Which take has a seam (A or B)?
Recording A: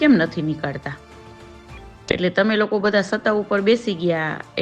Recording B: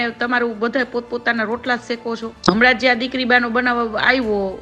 B